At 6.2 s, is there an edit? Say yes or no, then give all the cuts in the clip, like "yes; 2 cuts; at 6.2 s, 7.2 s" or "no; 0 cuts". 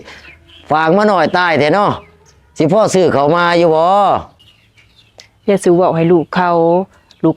no; 0 cuts